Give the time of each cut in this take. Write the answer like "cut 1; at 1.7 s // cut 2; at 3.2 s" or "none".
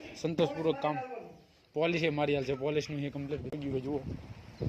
cut 1; at 3.6 s